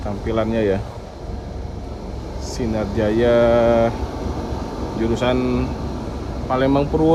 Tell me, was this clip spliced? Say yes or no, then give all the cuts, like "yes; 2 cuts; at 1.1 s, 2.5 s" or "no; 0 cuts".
no; 0 cuts